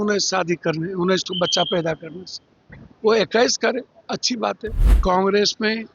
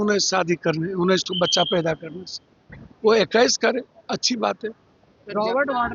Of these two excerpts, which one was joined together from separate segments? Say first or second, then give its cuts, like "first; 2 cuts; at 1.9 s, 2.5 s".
first; 1 cut; at 4.9 s